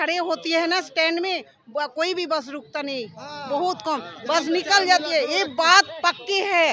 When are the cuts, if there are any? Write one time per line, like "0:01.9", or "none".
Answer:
none